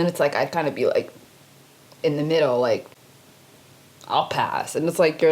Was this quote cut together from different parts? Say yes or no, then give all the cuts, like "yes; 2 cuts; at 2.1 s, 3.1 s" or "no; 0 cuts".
no; 0 cuts